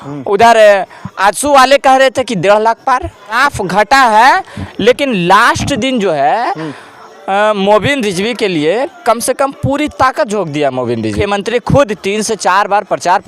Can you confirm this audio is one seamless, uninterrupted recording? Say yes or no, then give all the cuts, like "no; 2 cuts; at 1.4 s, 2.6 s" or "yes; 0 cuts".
no; 2 cuts; at 3.4 s, 11.2 s